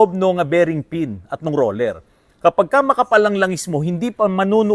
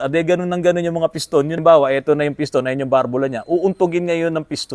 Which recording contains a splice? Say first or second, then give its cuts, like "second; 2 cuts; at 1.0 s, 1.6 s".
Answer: second; 1 cut; at 1.6 s